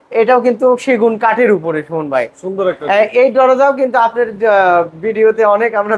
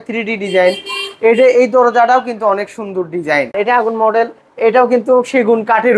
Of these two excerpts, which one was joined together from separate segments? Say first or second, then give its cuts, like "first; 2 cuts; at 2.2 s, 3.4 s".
second; 1 cut; at 3.5 s